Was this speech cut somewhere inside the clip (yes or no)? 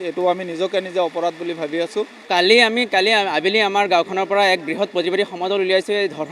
yes